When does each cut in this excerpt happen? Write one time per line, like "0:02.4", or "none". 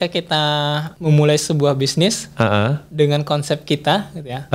0:00.9